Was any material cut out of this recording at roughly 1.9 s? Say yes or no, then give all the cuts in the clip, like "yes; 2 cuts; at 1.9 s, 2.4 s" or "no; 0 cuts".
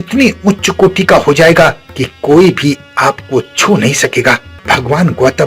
no; 1 cut; at 4.5 s